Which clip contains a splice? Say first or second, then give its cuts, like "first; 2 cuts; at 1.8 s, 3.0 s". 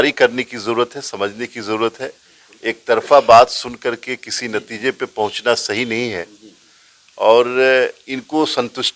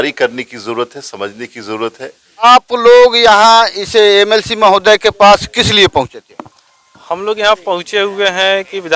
second; 1 cut; at 2.3 s